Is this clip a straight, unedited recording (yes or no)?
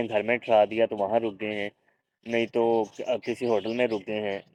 yes